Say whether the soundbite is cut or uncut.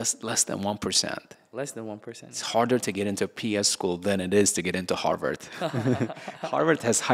uncut